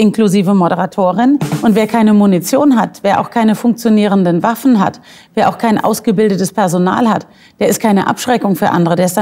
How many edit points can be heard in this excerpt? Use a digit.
1